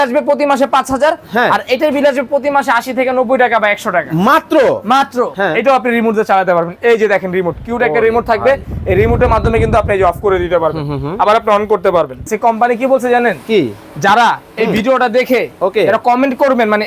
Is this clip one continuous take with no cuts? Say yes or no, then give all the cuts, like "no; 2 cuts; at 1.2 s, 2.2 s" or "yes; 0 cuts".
no; 2 cuts; at 5.3 s, 12.3 s